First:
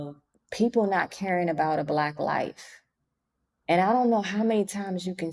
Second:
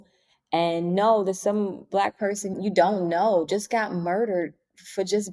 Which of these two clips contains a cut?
second; 1 cut; at 2.5 s

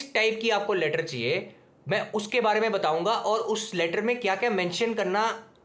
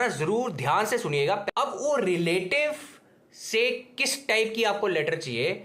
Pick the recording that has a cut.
second; 1 cut; at 1.4 s

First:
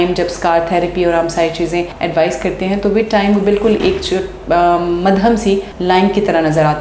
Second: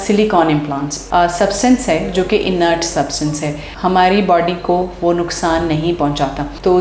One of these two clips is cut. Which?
second; 1 cut; at 1.1 s

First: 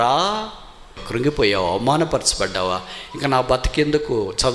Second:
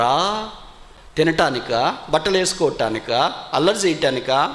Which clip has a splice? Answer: first; 1 cut; at 1.0 s

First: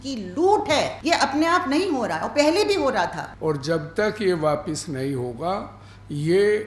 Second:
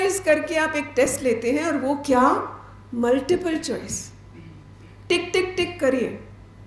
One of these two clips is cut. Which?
first; 2 cuts; at 1.0 s, 3.3 s

